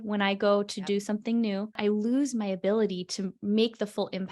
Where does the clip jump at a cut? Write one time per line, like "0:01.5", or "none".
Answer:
0:01.8